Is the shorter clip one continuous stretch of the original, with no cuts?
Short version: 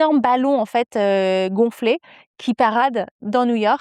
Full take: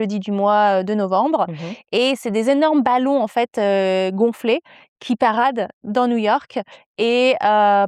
yes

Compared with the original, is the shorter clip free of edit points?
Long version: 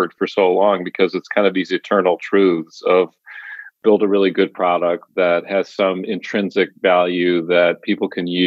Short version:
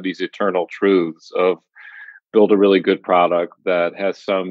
yes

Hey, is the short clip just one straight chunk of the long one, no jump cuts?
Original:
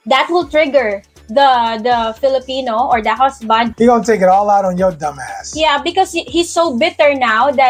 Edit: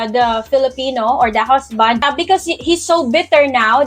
no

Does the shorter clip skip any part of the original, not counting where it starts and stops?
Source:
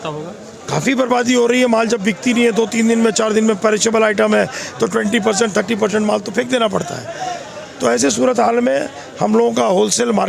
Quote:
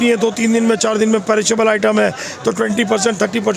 no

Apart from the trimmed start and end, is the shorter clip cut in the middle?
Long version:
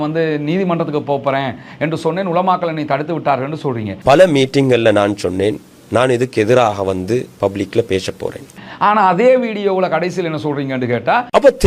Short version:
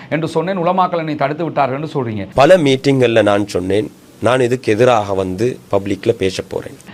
no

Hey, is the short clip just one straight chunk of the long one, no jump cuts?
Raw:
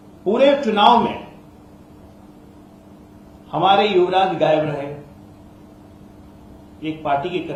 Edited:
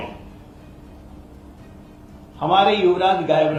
yes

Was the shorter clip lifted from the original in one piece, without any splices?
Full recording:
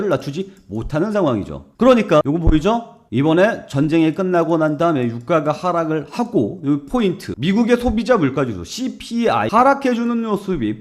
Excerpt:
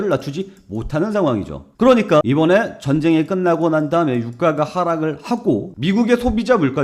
no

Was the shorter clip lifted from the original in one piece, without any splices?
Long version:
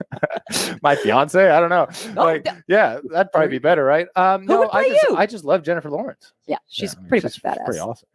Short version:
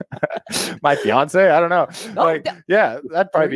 yes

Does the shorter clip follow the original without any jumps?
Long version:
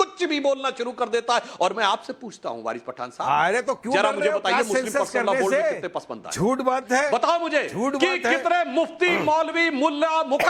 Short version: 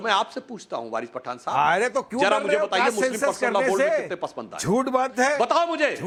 yes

